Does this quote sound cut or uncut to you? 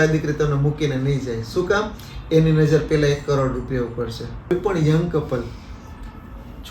cut